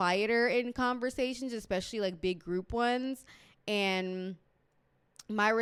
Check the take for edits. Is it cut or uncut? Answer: uncut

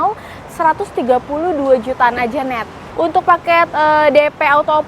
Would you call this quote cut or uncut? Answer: cut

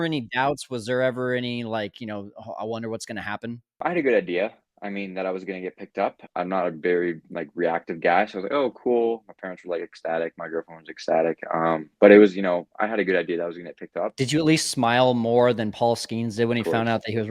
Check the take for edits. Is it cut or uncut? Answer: cut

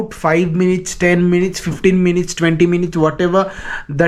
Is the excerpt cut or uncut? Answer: uncut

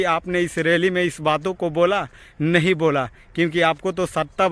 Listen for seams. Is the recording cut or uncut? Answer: uncut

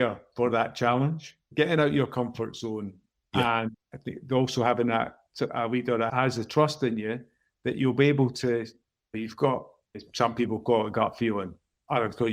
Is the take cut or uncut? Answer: cut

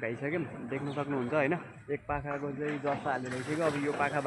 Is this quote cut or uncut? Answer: uncut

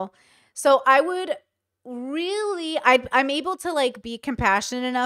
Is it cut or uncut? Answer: uncut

